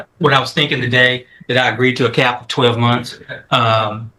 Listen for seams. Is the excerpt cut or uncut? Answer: uncut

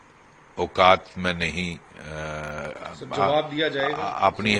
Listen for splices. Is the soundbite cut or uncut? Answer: uncut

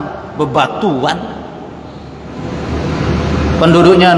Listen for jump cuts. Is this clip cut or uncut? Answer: uncut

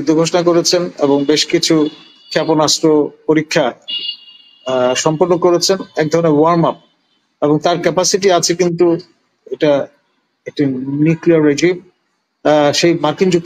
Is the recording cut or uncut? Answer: uncut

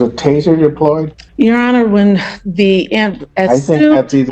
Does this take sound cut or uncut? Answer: cut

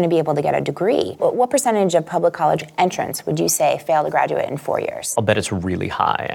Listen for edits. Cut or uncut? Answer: cut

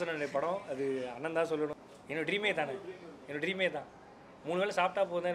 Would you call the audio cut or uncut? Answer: cut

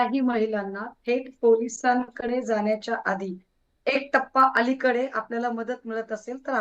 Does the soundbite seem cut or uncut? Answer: cut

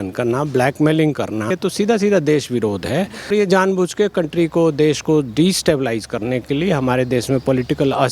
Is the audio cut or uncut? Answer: cut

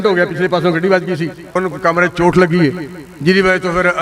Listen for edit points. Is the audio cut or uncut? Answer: cut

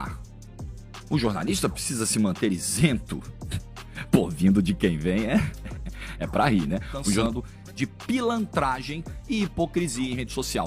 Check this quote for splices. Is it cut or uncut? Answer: cut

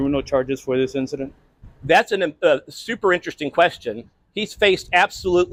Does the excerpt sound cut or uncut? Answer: uncut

